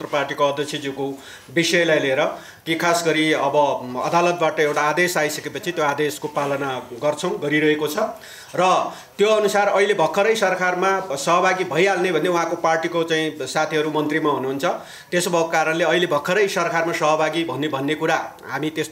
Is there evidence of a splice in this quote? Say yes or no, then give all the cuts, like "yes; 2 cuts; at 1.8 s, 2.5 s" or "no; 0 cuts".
no; 0 cuts